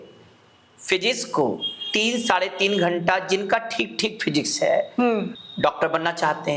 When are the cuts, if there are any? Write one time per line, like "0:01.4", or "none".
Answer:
0:05.3